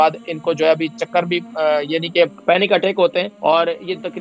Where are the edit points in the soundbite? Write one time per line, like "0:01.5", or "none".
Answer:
0:02.4
0:03.3